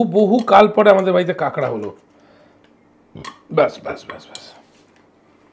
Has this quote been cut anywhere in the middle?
no; 0 cuts

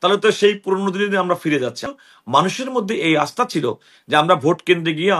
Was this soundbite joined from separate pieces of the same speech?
yes; 1 cut; at 1.9 s

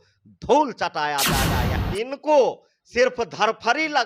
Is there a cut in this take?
yes; 1 cut; at 1.8 s

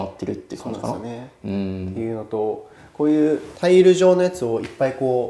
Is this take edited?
no; 0 cuts

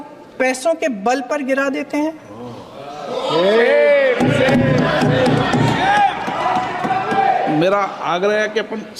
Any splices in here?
no; 0 cuts

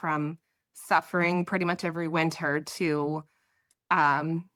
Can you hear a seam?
no; 0 cuts

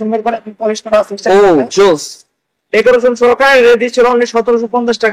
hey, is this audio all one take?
yes; 0 cuts

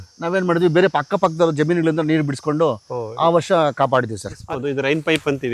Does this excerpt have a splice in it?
yes; 1 cut; at 4.4 s

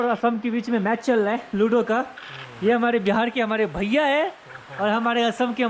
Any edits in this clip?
no; 0 cuts

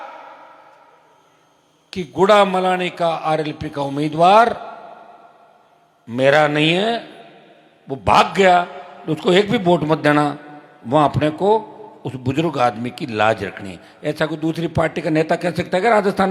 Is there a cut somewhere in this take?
no; 0 cuts

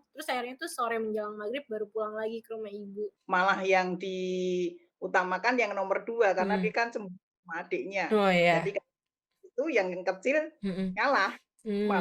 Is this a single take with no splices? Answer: no; 1 cut; at 3.1 s

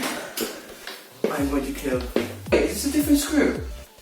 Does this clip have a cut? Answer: yes; 1 cut; at 2.4 s

